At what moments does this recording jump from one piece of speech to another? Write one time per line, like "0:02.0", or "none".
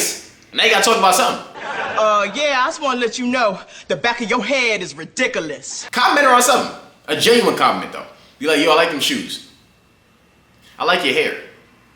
none